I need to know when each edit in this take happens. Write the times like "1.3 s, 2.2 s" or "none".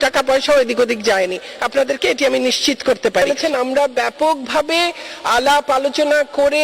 3.4 s